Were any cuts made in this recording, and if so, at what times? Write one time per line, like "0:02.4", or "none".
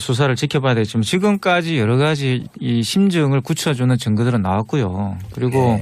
none